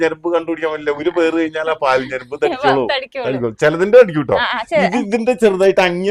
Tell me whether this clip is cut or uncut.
uncut